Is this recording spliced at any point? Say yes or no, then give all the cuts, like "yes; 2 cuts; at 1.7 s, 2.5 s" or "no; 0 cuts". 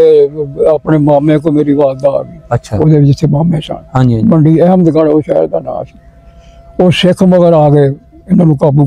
no; 0 cuts